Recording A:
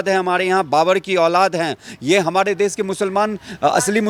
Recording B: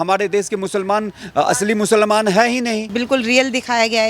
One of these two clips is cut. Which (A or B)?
B